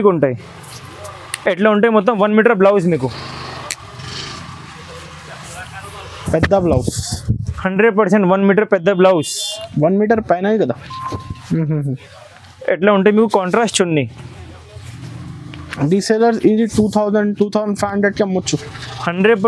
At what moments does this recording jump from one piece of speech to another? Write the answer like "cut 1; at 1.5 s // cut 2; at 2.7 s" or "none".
none

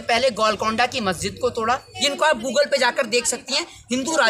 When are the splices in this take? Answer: cut 1; at 1.9 s

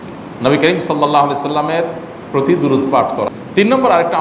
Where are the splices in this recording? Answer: cut 1; at 3.3 s

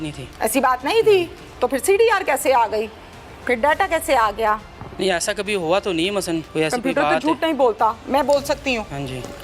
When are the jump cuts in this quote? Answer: cut 1; at 4.8 s // cut 2; at 6.5 s

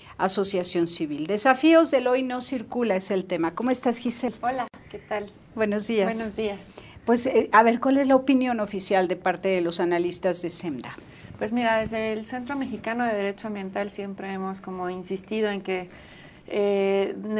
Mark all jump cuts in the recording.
cut 1; at 12.1 s

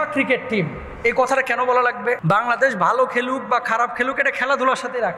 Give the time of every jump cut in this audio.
cut 1; at 2.2 s

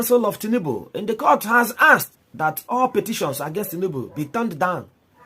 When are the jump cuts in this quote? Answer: cut 1; at 2.2 s

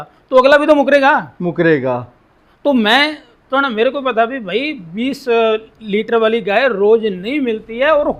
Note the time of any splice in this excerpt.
none

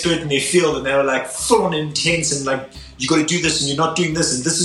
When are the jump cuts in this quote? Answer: none

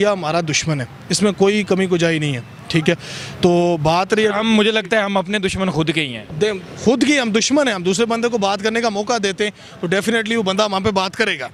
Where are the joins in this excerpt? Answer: none

